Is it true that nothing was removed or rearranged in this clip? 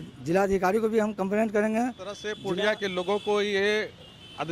no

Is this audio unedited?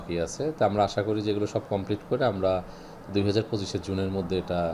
yes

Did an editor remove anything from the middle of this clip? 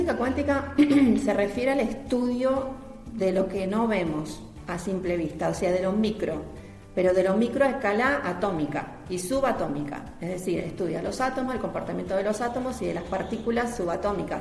no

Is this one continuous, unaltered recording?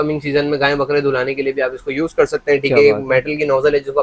yes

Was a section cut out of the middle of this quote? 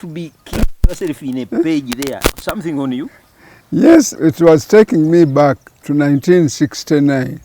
yes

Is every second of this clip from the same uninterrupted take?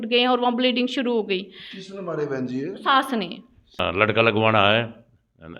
no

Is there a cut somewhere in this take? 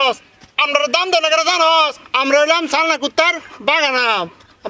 no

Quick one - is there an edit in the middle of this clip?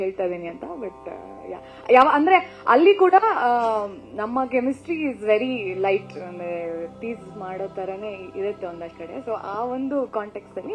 yes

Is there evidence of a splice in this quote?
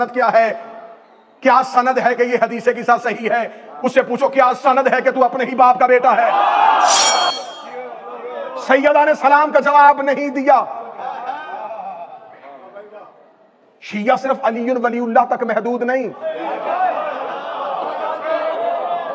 yes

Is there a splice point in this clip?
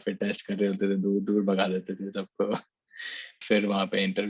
yes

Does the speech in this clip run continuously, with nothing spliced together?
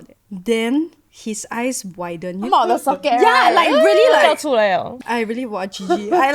no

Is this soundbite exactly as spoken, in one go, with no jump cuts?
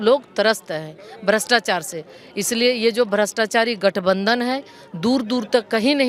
yes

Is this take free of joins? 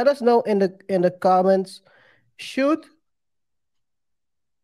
yes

